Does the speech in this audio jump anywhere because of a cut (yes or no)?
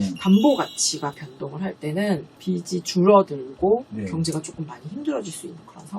yes